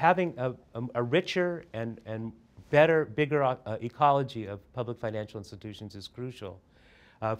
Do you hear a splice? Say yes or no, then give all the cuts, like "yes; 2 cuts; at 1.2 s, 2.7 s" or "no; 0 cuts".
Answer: no; 0 cuts